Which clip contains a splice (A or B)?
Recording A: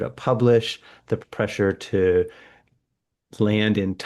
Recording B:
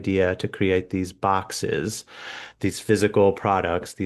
A